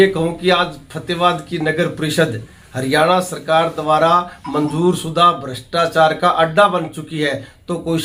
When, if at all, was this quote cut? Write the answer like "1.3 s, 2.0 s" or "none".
none

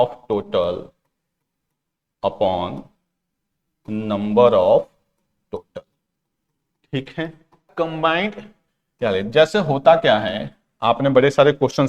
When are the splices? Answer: 7.7 s

